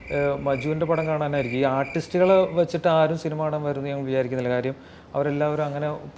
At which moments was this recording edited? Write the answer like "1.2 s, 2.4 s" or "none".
none